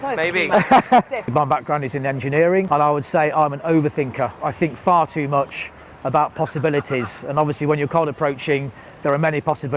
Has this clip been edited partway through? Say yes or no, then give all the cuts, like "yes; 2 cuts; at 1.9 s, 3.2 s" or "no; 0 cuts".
yes; 3 cuts; at 1.3 s, 2.7 s, 4.4 s